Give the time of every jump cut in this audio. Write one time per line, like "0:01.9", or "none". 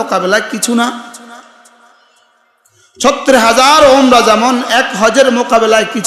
none